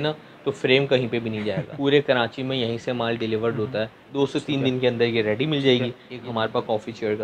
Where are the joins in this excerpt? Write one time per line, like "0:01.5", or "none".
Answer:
0:01.7
0:04.0
0:06.1